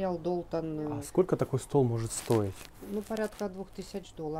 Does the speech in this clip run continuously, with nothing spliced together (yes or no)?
no